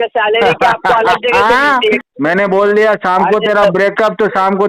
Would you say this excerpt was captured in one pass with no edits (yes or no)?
no